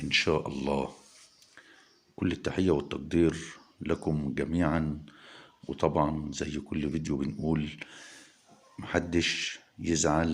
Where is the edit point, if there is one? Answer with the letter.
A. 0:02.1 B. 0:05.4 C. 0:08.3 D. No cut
B